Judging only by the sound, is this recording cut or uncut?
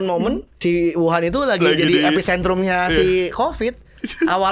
uncut